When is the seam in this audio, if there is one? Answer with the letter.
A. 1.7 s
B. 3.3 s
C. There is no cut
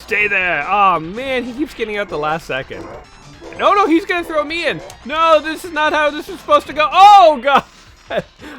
B